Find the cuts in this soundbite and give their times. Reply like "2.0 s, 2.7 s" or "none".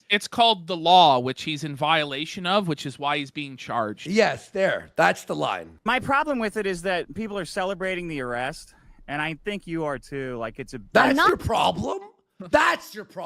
5.7 s